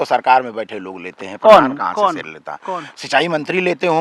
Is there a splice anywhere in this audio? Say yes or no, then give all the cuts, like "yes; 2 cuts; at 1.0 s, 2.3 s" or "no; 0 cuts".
no; 0 cuts